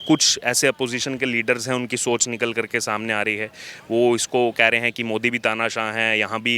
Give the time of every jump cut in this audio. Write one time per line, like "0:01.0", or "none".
none